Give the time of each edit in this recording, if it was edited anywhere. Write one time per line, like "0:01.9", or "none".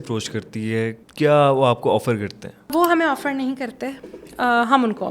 0:01.0
0:02.7